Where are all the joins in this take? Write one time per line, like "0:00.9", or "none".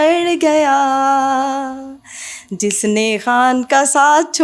none